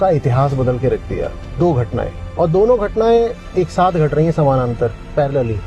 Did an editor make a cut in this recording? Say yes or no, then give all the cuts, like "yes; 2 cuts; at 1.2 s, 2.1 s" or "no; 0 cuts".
no; 0 cuts